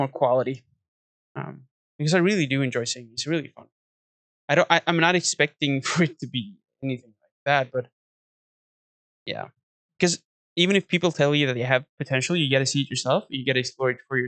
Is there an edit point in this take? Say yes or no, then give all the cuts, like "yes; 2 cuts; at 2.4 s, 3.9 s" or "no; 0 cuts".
no; 0 cuts